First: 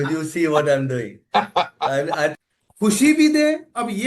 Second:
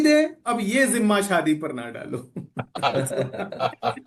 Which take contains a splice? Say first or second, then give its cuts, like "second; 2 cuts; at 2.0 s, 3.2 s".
first; 1 cut; at 2.4 s